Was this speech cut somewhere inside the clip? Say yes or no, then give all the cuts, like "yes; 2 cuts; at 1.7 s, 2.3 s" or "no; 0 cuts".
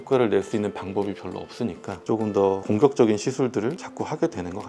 no; 0 cuts